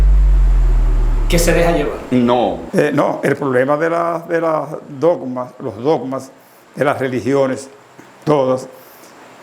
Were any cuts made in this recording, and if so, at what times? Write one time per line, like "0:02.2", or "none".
0:02.6